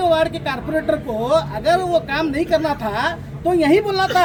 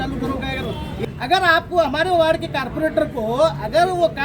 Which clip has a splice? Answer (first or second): second